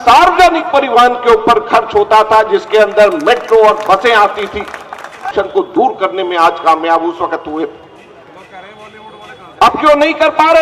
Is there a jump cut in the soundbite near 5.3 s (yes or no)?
yes